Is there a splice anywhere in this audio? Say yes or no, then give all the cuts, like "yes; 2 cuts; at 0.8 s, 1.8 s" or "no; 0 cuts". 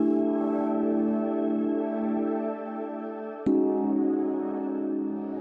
yes; 1 cut; at 4.0 s